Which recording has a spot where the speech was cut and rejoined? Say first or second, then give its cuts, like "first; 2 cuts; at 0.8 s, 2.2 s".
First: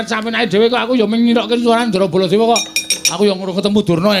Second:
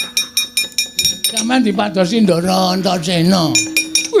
second; 1 cut; at 1.0 s